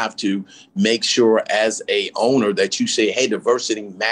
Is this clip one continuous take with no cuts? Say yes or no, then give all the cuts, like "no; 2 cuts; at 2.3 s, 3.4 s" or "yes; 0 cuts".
yes; 0 cuts